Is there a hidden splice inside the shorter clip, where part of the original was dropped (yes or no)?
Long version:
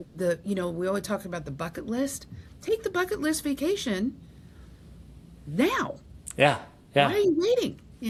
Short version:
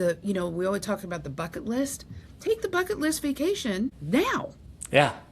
yes